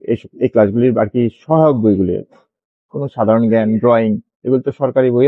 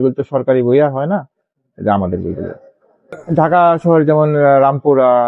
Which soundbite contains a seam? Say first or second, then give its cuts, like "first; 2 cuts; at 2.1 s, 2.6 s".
second; 1 cut; at 3.2 s